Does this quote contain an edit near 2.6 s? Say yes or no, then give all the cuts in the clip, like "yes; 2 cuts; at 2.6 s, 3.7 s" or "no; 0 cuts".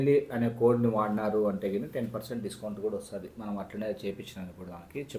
no; 0 cuts